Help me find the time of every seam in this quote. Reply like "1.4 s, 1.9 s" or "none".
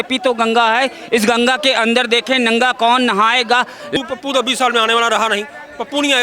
4.0 s

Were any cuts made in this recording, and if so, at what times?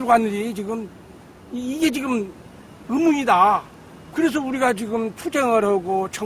none

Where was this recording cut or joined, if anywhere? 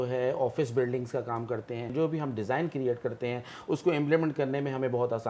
1.9 s

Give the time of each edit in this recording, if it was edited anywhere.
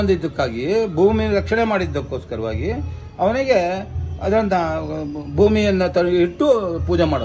none

